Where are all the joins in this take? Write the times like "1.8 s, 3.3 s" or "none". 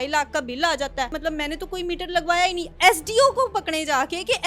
1.1 s, 2.6 s